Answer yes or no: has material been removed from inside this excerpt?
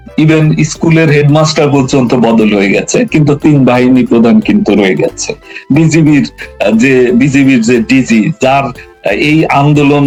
no